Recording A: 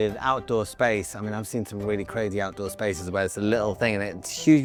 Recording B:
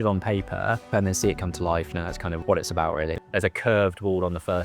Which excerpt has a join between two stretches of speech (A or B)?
B